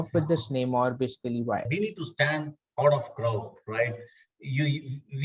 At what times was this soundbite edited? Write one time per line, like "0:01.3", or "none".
0:01.7